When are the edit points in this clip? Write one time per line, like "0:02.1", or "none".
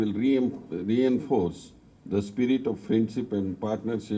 0:01.4